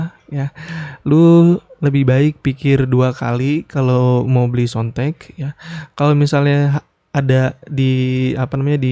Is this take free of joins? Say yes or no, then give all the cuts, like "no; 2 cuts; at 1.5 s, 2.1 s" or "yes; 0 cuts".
yes; 0 cuts